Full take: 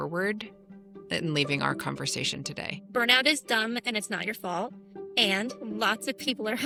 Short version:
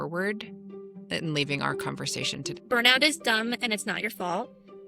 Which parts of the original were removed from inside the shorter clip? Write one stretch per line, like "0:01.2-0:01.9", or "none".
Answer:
0:02.5-0:02.8

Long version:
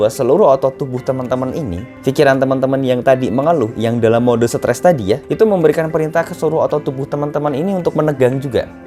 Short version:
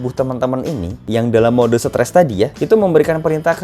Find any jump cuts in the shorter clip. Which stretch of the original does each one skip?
0:01.9-0:03.7

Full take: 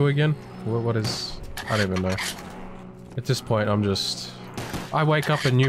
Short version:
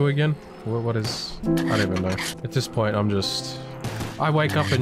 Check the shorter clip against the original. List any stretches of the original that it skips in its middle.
0:02.3-0:03.1

